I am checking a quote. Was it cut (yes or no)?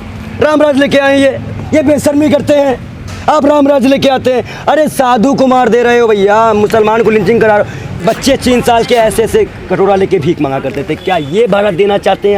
yes